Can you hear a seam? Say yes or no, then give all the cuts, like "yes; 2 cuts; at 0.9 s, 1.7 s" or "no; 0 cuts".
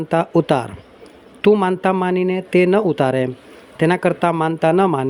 yes; 1 cut; at 1.1 s